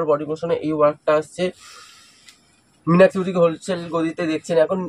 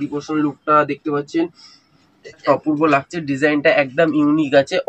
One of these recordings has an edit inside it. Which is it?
second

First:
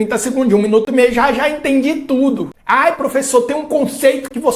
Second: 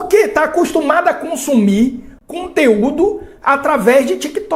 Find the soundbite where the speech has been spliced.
first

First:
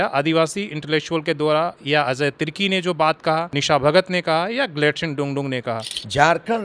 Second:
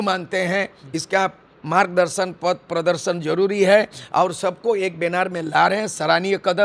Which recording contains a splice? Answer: first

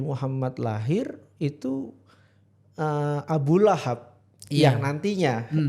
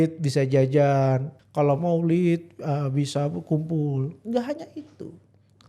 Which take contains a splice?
second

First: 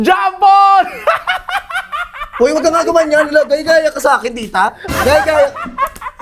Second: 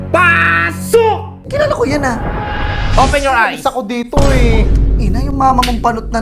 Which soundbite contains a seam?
second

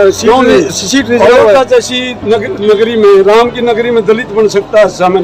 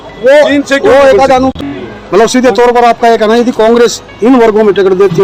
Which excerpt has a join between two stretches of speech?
second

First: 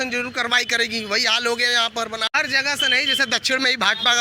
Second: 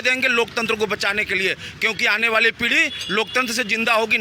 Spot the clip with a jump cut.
first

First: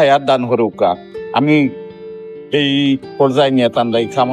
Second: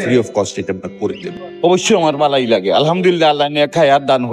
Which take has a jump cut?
second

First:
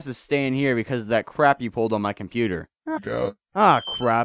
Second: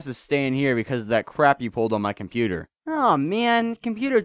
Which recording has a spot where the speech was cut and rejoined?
second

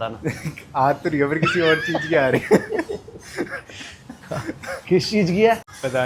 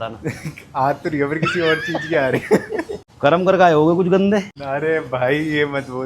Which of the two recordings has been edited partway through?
second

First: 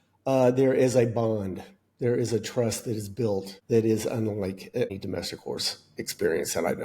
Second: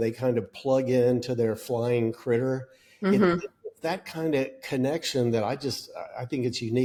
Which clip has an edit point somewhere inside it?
first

